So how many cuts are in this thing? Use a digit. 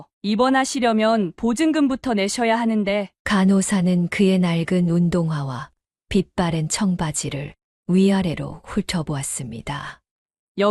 0